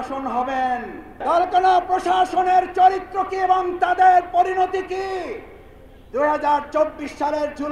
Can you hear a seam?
yes; 1 cut; at 1.2 s

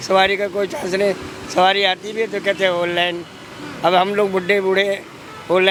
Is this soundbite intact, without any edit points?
yes; 0 cuts

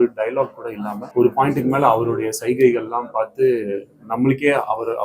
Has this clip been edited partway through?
yes; 1 cut; at 0.9 s

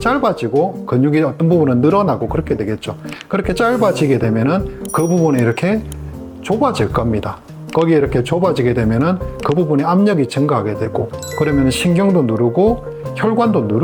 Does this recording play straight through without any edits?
yes; 0 cuts

